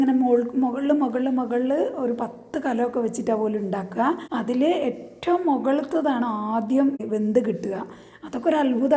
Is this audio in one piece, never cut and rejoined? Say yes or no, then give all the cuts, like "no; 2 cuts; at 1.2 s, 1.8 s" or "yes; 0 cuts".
no; 2 cuts; at 4.2 s, 7.0 s